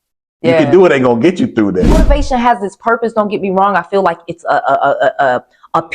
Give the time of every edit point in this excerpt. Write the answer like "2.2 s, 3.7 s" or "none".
1.9 s

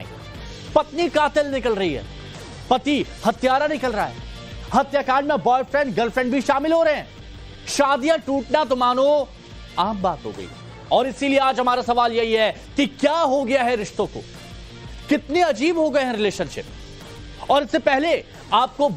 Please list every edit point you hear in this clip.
1.9 s

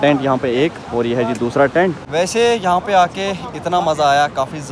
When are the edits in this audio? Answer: 2.1 s

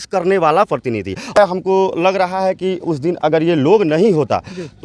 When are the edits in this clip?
1.4 s

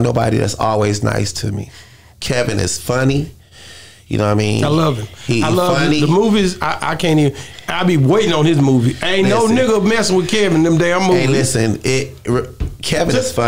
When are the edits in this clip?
none

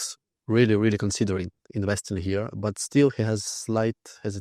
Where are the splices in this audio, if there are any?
none

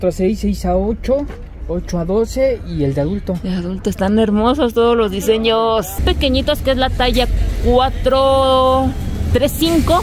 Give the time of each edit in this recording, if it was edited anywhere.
6.0 s

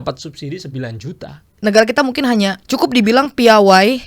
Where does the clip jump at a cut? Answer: 1.5 s, 2.6 s

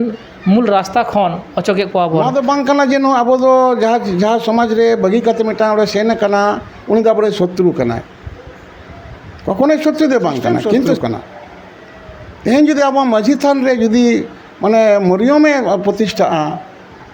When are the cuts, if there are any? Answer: 2.2 s, 10.9 s

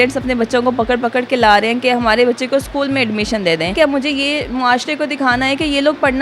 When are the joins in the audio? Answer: 3.7 s

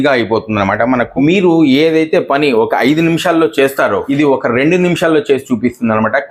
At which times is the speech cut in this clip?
1.1 s, 4.0 s

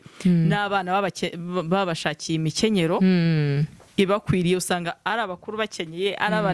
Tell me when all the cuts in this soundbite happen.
none

